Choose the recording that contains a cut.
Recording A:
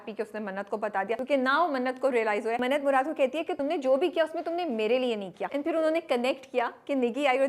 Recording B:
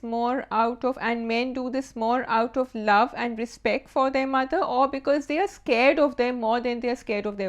A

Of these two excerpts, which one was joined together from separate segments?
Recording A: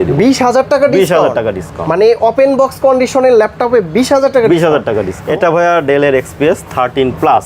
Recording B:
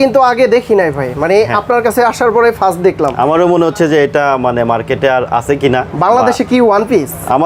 A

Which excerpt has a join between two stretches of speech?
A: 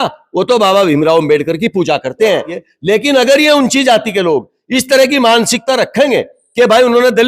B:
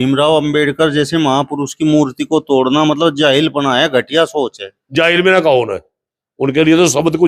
A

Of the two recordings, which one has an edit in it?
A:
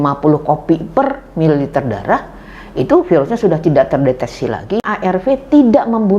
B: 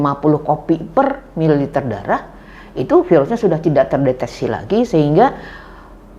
A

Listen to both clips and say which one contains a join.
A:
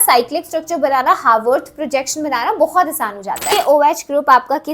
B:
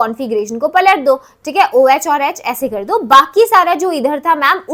A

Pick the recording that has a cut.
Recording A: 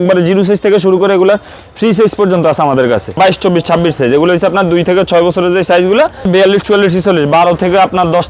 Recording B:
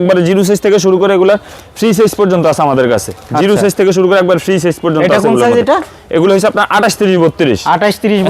A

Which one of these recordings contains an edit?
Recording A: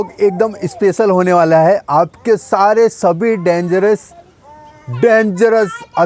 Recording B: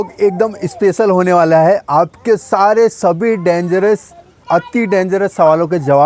B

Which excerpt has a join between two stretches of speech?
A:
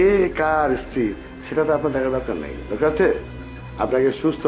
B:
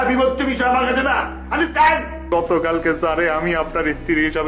B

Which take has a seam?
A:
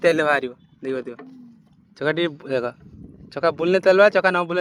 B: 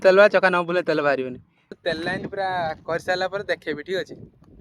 B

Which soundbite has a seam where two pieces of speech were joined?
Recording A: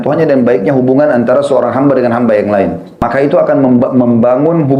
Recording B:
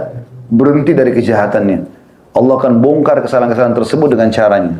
A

